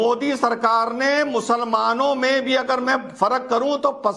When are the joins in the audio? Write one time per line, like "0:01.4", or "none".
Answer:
none